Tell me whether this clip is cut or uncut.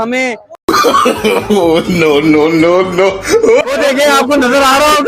uncut